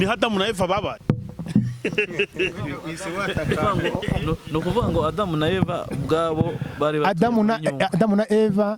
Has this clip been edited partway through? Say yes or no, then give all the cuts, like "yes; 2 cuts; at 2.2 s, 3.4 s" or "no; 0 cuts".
yes; 1 cut; at 0.9 s